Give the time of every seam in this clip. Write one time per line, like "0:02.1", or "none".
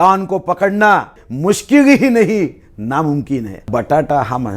0:01.3
0:03.7